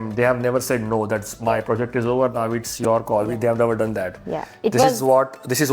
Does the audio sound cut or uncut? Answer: uncut